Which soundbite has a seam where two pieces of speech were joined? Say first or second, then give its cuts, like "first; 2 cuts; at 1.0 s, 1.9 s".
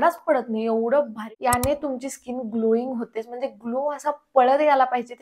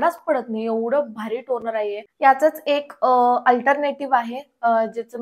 first; 1 cut; at 1.2 s